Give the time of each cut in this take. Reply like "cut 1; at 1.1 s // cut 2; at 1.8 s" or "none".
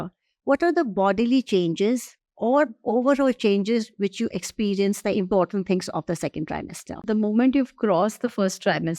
cut 1; at 7.0 s